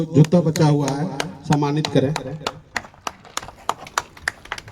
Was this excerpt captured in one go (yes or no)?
yes